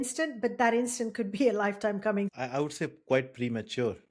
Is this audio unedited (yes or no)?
no